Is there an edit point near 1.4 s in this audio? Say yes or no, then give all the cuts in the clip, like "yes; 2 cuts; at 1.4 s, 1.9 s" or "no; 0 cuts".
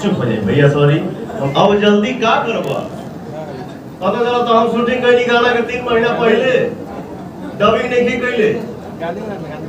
yes; 1 cut; at 1.4 s